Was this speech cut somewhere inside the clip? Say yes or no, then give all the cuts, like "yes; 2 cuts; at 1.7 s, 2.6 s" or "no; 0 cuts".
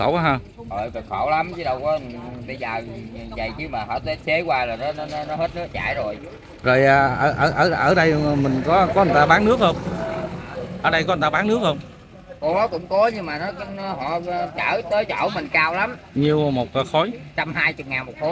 no; 0 cuts